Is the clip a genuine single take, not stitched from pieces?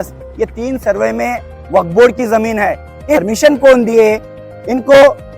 no; 1 cut; at 3.2 s

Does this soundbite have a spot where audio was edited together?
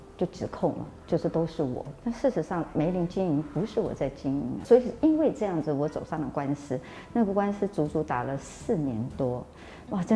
yes; 1 cut; at 4.6 s

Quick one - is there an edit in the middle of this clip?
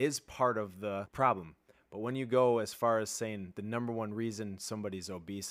yes; 1 cut; at 1.1 s

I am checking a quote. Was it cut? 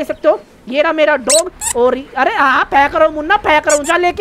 no; 0 cuts

